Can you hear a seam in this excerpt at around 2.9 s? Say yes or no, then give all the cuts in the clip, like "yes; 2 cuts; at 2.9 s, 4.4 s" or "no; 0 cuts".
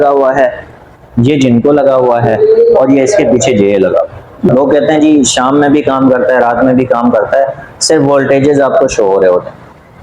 no; 1 cut; at 4.5 s